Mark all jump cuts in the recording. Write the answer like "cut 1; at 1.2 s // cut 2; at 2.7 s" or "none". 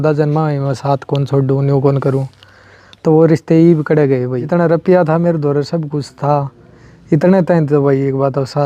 cut 1; at 4.4 s